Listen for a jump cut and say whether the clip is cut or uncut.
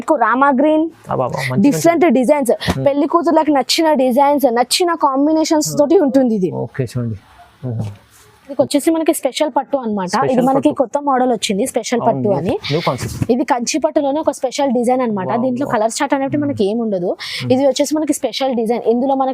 cut